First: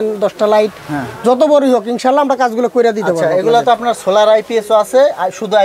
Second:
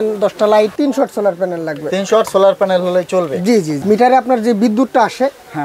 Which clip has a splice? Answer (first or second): second